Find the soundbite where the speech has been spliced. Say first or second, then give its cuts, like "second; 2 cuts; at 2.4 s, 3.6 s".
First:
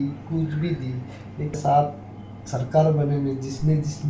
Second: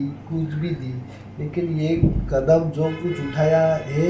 first; 1 cut; at 1.5 s